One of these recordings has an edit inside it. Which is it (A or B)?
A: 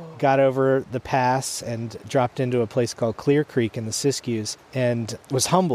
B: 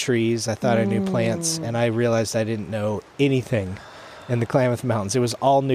A